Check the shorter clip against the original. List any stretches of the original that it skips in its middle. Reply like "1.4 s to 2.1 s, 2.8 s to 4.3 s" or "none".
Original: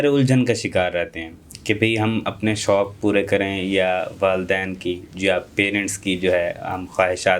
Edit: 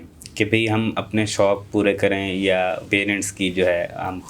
4.1 s to 5.5 s